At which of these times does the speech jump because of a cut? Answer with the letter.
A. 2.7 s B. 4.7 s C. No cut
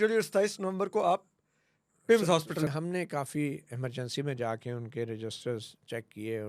A